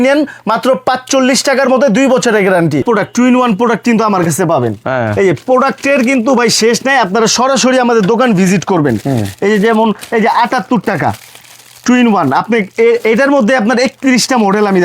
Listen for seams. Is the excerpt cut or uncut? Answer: cut